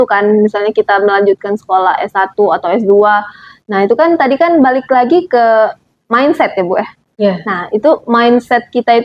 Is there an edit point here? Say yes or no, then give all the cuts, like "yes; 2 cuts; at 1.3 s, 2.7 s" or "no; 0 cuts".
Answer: no; 0 cuts